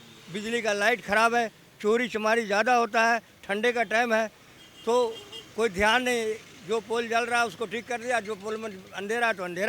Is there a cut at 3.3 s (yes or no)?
no